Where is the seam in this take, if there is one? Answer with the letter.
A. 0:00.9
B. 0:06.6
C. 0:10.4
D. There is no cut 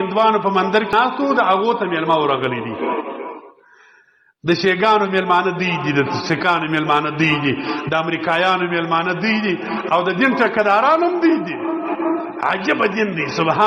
A